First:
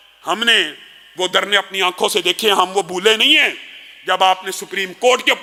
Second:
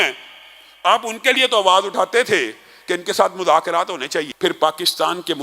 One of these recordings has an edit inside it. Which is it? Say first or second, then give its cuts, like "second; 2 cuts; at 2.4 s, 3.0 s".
second; 1 cut; at 4.3 s